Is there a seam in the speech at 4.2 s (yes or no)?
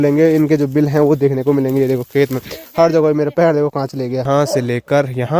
yes